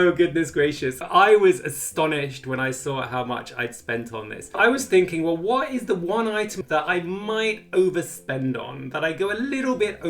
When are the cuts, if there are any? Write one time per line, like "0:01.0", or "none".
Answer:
0:01.1
0:04.6
0:06.5